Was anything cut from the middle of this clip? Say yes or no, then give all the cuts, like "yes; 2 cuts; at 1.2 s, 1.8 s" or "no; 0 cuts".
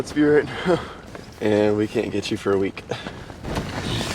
no; 0 cuts